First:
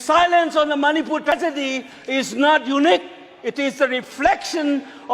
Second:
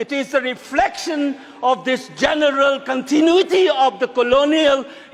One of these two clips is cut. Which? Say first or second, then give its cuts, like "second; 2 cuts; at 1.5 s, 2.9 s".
first; 1 cut; at 1.3 s